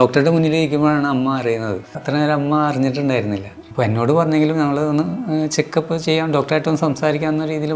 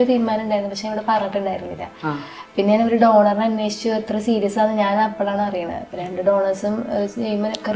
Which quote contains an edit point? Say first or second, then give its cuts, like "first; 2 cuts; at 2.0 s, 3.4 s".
first; 2 cuts; at 2.0 s, 3.6 s